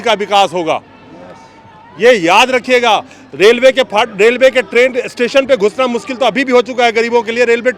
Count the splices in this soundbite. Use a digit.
0